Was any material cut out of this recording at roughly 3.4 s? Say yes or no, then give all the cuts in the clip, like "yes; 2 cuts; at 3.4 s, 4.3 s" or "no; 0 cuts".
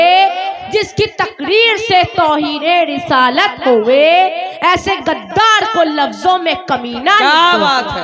no; 0 cuts